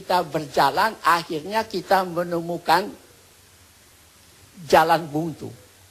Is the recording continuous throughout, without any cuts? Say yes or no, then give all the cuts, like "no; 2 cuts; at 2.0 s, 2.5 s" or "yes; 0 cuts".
yes; 0 cuts